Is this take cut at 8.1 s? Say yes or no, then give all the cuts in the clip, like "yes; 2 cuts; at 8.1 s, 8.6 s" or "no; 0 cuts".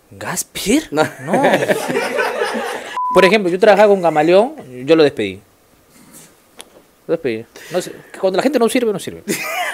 no; 1 cut; at 2.8 s